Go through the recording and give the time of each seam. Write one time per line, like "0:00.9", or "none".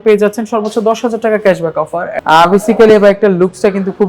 0:02.0